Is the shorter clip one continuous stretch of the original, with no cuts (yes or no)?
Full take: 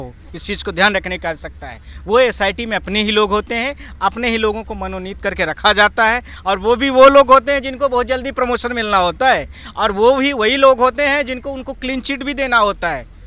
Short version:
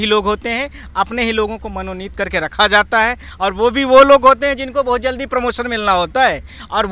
yes